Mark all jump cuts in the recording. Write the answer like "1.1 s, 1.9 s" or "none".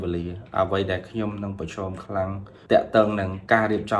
2.5 s